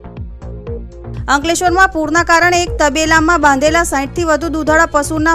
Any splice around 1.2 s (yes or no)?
yes